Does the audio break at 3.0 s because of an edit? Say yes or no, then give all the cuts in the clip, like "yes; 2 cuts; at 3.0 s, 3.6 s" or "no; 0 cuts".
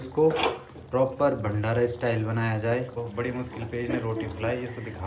yes; 1 cut; at 3.0 s